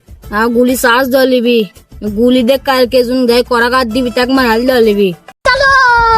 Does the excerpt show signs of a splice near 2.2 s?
no; 1 cut; at 5.3 s

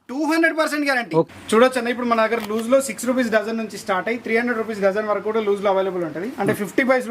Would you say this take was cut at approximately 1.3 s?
yes; 1 cut; at 1.3 s

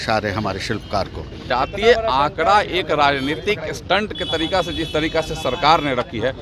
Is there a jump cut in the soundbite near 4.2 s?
no; 1 cut; at 1.4 s

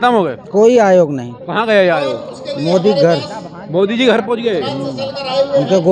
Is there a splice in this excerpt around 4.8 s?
no; 0 cuts

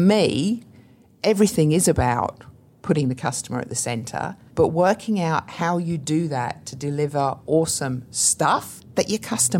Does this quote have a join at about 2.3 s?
no; 2 cuts; at 4.4 s, 8.7 s

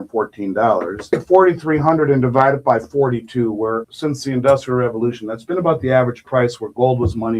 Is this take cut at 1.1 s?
yes; 2 cuts; at 1.1 s, 3.9 s

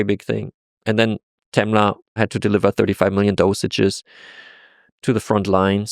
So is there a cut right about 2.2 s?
yes; 2 cuts; at 2.2 s, 4.9 s

